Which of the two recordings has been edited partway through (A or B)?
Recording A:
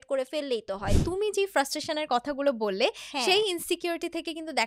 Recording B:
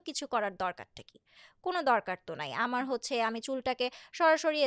A